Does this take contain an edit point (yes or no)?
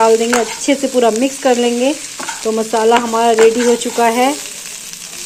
no